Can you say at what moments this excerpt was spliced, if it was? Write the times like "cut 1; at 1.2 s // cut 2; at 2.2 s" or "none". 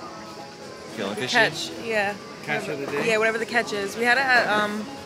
none